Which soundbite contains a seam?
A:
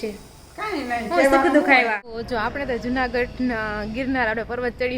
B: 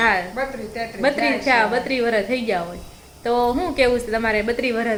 A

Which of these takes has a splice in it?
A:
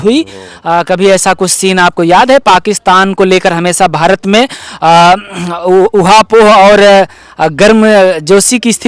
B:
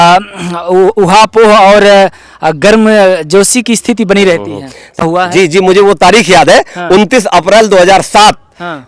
B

